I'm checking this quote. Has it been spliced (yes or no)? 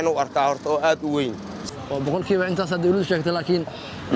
yes